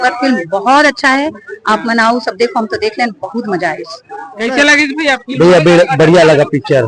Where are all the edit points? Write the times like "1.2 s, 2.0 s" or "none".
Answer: 4.4 s